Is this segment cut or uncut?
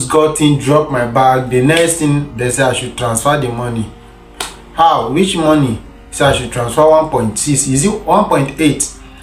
uncut